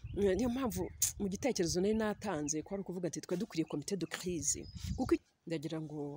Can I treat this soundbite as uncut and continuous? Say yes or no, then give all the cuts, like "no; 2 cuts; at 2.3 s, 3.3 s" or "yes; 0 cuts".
no; 1 cut; at 5.2 s